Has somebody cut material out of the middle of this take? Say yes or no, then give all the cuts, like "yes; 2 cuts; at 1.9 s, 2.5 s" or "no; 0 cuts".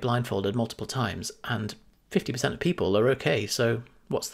no; 0 cuts